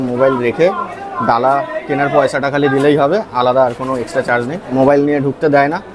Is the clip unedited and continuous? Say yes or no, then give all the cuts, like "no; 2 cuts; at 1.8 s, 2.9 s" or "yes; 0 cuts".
yes; 0 cuts